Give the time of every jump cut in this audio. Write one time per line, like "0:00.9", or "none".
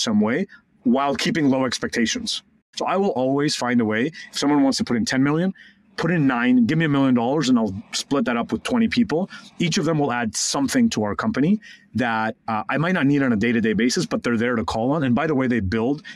0:02.6